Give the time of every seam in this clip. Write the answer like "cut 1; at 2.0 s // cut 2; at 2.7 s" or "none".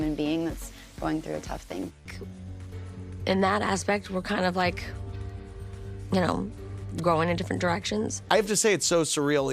cut 1; at 1.9 s // cut 2; at 8.2 s